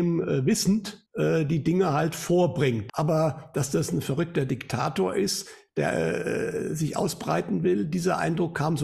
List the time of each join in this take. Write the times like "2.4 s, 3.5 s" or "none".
1.0 s, 2.8 s